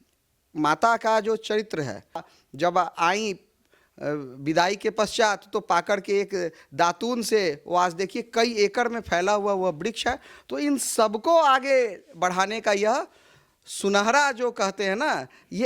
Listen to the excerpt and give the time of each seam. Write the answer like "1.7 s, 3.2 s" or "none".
2.3 s